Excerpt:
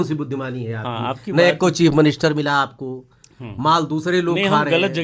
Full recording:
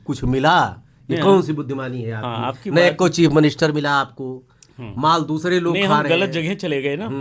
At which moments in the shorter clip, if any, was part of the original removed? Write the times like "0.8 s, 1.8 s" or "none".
none